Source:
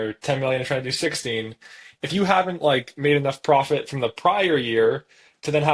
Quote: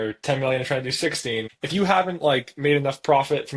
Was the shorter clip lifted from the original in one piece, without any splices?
no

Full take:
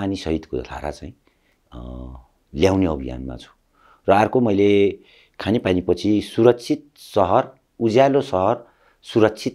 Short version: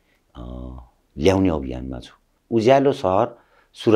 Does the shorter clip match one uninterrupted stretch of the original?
no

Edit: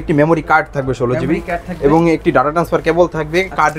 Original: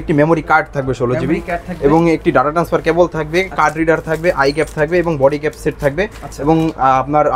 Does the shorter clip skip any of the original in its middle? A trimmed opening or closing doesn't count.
no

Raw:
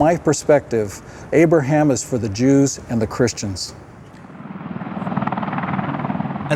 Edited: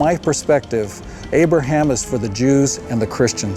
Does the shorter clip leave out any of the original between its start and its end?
no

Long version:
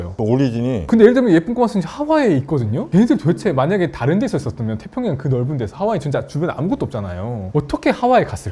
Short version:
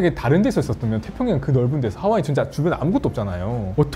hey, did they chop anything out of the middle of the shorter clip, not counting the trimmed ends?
no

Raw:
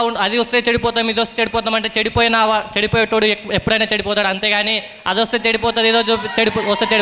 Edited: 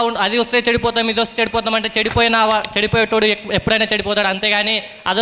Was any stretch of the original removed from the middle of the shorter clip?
no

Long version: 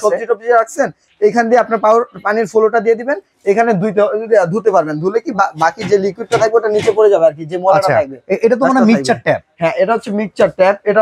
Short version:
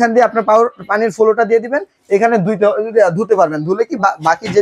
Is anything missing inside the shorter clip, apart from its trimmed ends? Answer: no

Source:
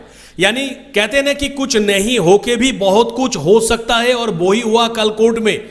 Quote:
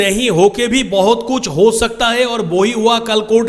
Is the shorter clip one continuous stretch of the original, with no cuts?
yes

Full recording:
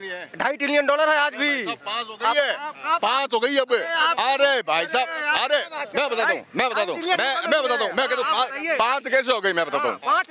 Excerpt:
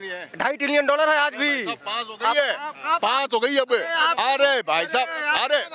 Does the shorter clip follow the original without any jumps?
yes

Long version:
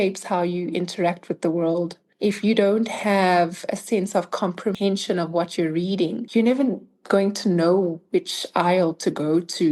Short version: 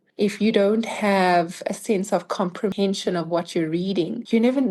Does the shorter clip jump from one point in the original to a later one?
no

